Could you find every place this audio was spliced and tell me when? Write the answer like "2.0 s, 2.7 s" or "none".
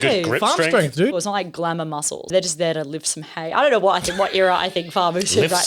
1.2 s, 2.3 s